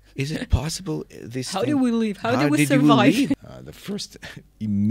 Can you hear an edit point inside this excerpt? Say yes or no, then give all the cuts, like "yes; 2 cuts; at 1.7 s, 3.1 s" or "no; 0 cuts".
yes; 1 cut; at 3.4 s